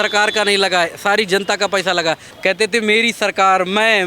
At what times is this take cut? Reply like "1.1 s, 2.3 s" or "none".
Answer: 2.3 s

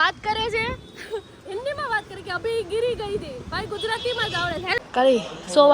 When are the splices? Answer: 4.8 s

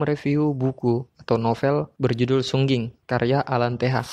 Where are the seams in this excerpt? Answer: 1.1 s, 1.9 s, 3.0 s

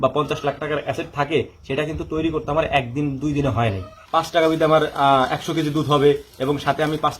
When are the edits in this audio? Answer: 4.0 s

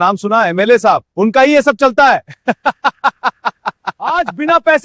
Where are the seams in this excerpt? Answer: 3.8 s

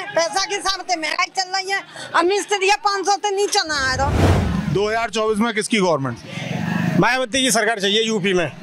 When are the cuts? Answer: 4.3 s

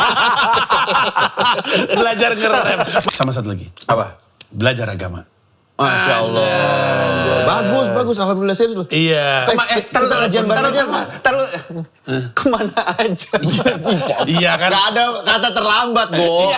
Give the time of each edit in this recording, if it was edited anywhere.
3.1 s

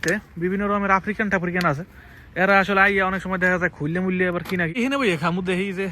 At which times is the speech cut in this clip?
4.7 s

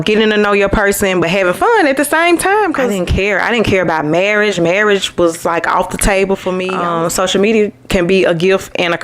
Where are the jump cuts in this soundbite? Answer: 2.9 s, 6.7 s

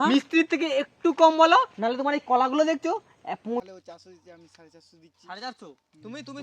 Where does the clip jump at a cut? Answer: 3.6 s

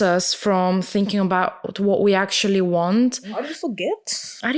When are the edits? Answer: 3.4 s

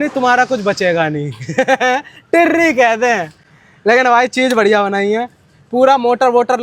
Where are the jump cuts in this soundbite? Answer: none

